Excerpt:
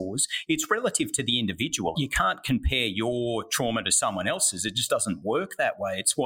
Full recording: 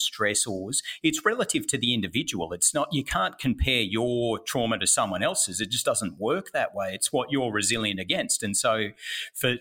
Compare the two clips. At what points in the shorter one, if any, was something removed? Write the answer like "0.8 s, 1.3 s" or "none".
1.9 s